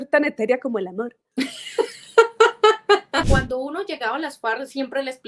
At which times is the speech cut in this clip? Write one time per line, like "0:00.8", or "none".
0:01.2
0:03.3